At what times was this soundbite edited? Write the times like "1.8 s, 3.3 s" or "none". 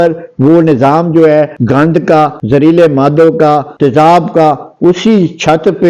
2.3 s, 3.7 s